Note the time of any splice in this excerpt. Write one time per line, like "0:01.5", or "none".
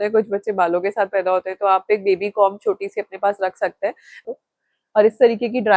0:04.1